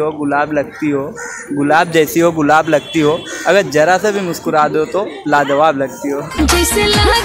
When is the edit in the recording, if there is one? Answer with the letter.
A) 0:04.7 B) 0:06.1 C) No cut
C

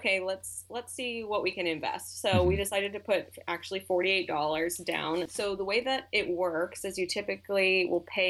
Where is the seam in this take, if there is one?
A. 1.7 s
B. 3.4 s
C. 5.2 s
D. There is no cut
C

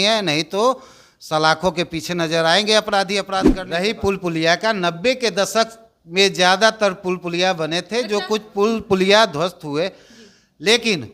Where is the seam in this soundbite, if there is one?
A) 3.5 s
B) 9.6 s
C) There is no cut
A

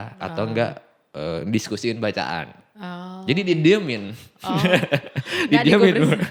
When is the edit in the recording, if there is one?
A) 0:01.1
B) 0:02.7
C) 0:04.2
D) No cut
D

